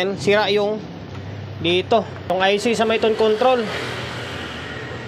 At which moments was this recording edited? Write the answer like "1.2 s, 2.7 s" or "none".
2.3 s